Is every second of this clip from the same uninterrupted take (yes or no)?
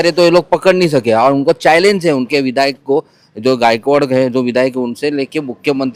yes